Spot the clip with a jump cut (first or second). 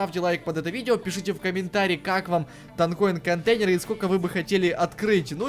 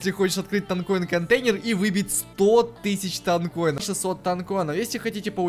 second